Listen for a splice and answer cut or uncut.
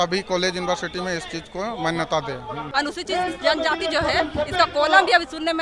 cut